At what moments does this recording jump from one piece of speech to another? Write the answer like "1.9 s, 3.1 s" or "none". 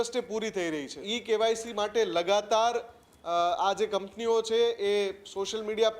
1.0 s